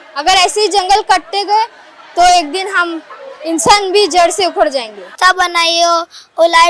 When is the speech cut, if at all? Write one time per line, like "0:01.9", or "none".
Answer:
0:05.1